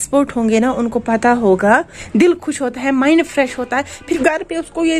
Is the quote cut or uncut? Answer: cut